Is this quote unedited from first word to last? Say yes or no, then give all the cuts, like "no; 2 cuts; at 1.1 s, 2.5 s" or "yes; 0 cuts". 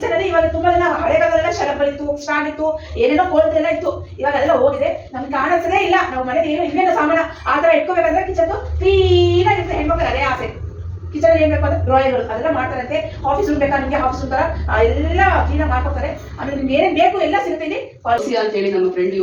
no; 1 cut; at 18.2 s